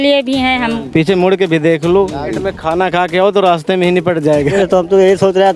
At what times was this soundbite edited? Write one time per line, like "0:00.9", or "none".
0:00.8
0:02.3
0:04.5